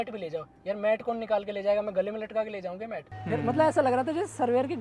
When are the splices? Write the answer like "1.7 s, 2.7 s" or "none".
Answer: 3.1 s